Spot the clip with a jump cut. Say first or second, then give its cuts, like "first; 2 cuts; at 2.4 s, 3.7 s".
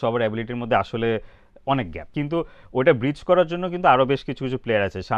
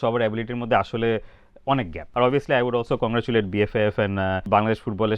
second; 2 cuts; at 2.0 s, 4.4 s